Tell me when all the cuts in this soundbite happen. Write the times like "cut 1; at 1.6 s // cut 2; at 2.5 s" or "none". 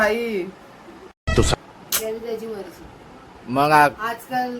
cut 1; at 1.5 s